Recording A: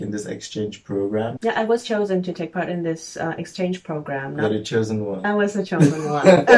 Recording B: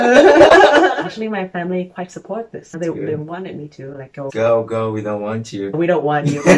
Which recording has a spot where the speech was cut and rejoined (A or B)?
B